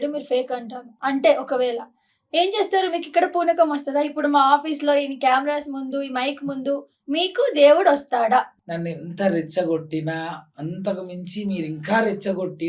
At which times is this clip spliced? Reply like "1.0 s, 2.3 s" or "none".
1.0 s, 8.6 s